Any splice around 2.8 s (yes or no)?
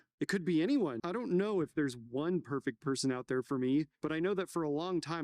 no